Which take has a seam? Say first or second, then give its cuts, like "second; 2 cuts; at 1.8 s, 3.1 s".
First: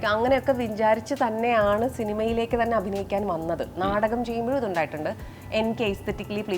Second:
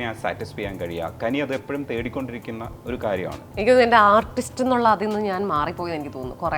second; 1 cut; at 3.4 s